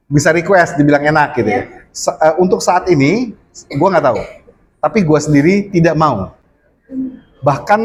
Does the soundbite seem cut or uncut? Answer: uncut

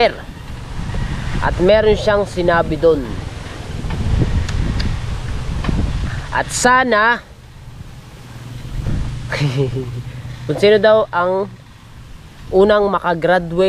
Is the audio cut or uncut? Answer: uncut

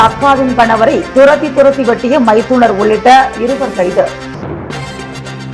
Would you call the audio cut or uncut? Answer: cut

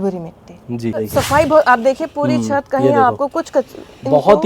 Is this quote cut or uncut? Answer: cut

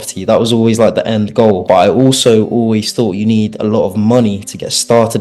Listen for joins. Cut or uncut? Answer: uncut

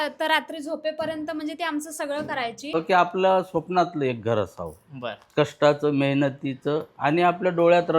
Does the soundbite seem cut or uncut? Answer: cut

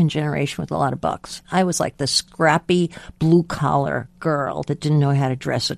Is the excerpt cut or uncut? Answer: cut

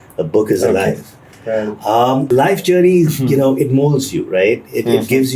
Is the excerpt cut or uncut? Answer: cut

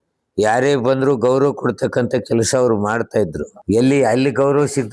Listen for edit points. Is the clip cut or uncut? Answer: cut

